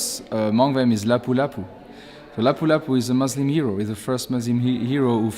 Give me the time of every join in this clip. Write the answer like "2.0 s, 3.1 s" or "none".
none